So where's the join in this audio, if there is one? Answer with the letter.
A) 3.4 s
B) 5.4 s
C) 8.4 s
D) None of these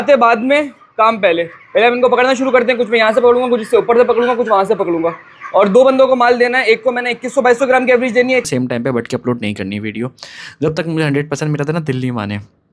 C